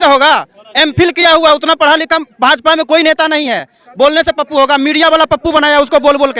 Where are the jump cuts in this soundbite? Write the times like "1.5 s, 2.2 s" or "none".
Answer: none